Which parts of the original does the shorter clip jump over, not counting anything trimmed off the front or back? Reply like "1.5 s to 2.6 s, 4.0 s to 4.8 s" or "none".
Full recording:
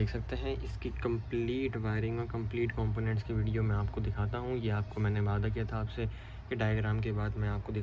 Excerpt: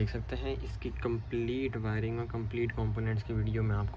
none